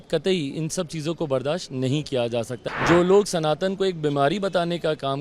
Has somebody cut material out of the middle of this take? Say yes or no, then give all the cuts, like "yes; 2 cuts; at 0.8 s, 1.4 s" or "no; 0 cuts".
yes; 1 cut; at 2.6 s